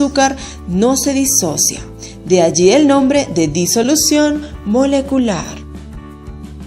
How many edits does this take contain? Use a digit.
1